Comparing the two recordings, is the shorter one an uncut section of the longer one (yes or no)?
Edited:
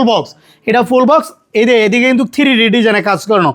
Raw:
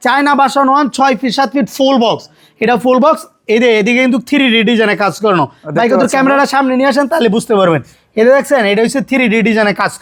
yes